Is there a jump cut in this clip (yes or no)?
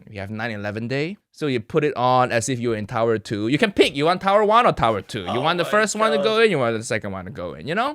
yes